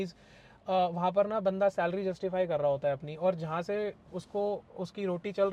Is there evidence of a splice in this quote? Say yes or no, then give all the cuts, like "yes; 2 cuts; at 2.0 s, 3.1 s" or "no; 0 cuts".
no; 0 cuts